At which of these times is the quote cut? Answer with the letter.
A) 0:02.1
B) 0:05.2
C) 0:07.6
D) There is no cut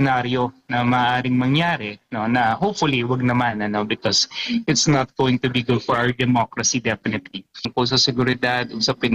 C